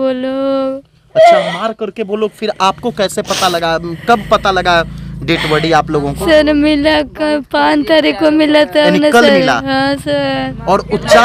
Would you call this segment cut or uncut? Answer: uncut